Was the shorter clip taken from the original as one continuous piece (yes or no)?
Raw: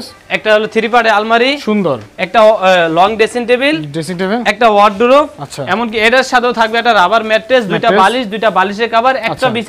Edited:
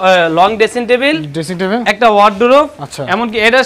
yes